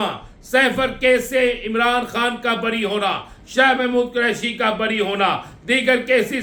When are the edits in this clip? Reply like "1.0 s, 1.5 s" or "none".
none